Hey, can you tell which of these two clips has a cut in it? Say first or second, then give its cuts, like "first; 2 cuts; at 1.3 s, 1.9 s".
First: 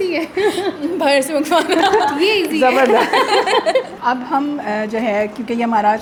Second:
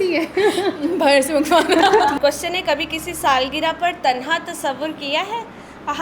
second; 1 cut; at 2.2 s